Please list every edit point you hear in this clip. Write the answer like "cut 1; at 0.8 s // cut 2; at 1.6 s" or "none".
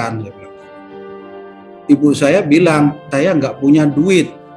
cut 1; at 3.0 s